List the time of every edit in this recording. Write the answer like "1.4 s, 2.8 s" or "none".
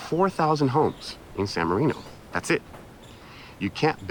none